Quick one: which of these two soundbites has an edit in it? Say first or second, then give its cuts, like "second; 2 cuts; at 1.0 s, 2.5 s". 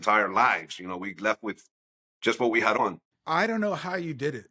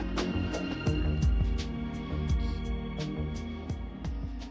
first; 1 cut; at 2.8 s